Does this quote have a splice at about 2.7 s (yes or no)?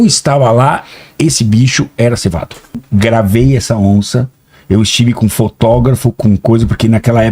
yes